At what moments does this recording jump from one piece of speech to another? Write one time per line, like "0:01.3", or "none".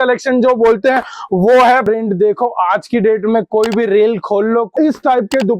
0:01.8
0:04.7